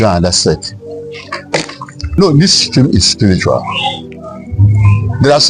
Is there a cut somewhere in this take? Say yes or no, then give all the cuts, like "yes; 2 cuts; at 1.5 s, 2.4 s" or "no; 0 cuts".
yes; 1 cut; at 2.2 s